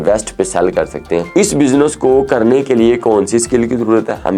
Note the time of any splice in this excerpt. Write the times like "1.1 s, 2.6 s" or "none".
1.3 s

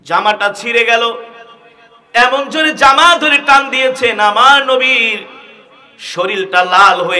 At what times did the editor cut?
none

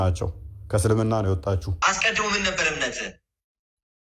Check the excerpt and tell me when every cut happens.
1.7 s

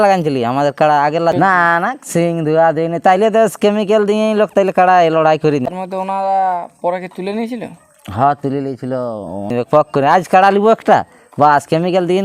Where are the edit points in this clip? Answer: 1.3 s, 5.7 s, 9.5 s

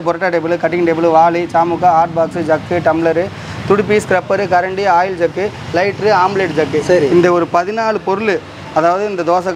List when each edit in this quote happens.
none

